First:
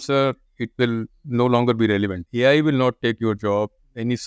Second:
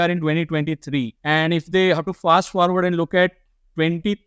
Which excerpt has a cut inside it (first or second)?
first